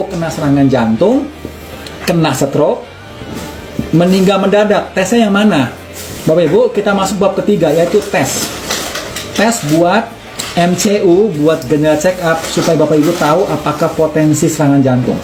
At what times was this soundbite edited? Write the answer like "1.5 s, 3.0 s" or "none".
none